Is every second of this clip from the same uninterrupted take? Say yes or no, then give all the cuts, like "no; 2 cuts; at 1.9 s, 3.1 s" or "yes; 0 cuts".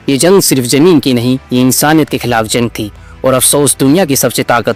yes; 0 cuts